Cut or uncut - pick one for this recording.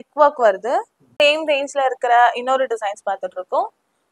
cut